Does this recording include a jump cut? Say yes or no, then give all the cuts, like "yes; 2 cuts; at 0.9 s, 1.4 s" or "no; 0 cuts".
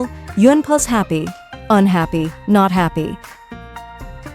yes; 1 cut; at 3.4 s